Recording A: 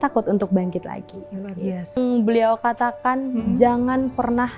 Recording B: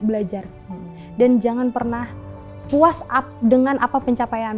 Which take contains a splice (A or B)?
A